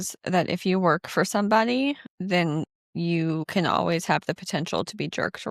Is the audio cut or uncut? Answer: cut